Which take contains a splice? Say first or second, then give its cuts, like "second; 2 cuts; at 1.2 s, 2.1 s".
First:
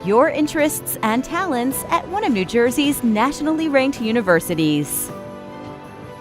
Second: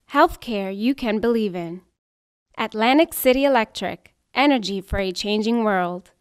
first; 1 cut; at 4.9 s